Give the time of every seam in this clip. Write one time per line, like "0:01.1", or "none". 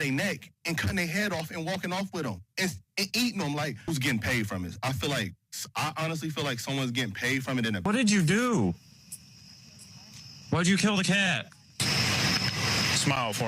0:03.9
0:07.9